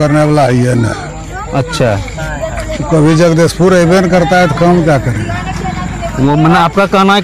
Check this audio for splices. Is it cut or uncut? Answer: uncut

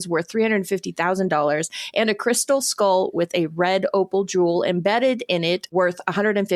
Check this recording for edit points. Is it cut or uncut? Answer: uncut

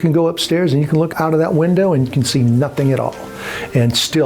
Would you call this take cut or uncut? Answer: cut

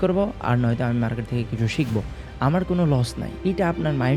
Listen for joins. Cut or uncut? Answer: cut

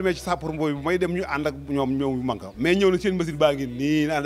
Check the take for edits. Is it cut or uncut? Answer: uncut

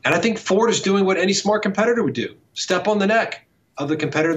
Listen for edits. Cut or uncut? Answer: uncut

